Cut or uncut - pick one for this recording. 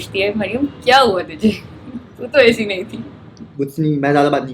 cut